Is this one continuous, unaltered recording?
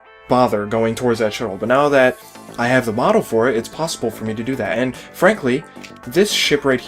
yes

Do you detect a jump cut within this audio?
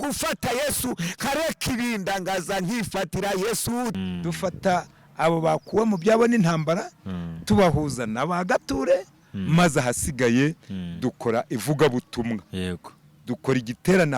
yes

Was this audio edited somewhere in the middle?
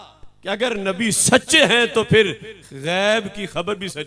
no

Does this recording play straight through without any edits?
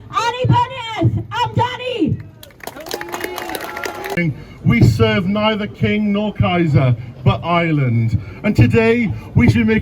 no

